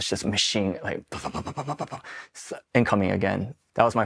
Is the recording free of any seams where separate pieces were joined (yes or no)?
yes